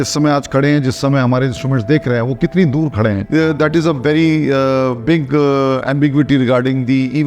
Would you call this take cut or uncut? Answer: uncut